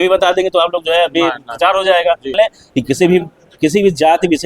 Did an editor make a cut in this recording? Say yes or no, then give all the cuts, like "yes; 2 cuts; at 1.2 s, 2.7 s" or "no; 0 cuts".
yes; 1 cut; at 2.3 s